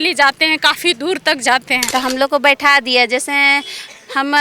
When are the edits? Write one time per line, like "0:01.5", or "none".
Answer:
0:01.8